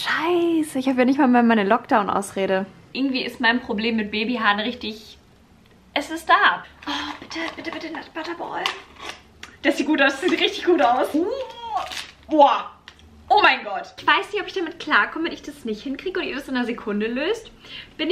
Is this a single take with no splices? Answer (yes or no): no